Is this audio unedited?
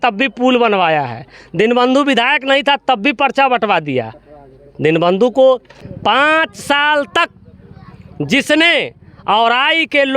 no; 1 cut; at 5.8 s

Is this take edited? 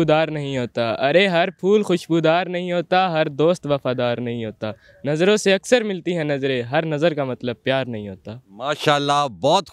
no; 0 cuts

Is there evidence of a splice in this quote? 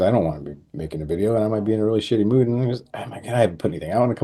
no; 0 cuts

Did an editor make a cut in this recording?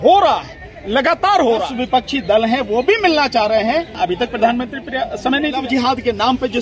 yes; 3 cuts; at 1.7 s, 4.0 s, 5.6 s

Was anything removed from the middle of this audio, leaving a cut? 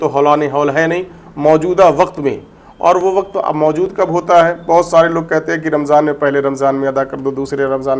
no; 0 cuts

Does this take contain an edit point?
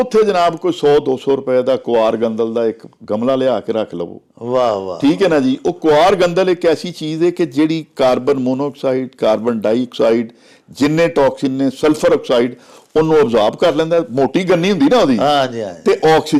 no; 0 cuts

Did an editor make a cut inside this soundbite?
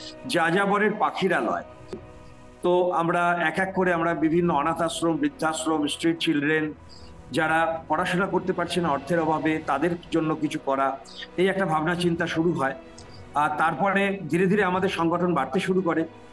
yes; 1 cut; at 2.0 s

